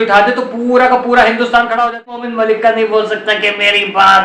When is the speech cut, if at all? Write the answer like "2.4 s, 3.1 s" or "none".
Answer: 2.2 s